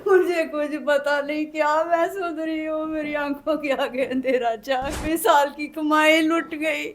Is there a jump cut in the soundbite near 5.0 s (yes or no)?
yes